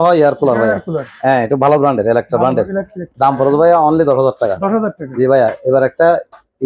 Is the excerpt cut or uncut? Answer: uncut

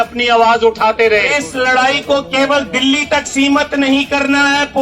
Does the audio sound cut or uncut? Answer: cut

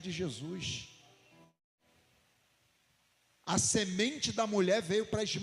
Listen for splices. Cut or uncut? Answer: cut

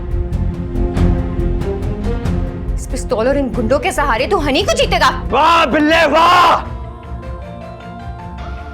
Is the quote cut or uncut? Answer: cut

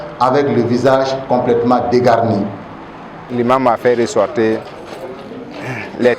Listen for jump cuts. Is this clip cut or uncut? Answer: cut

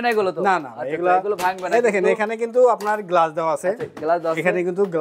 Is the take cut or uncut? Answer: uncut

